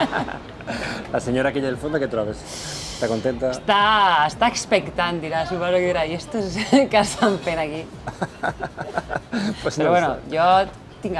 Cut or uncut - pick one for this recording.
uncut